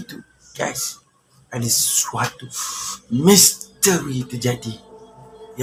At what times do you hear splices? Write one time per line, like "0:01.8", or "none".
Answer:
none